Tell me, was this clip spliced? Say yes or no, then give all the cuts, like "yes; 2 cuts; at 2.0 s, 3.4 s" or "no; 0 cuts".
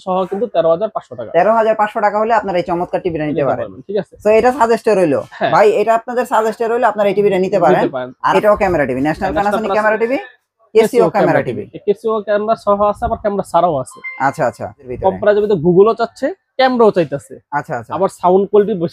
yes; 2 cuts; at 8.3 s, 14.9 s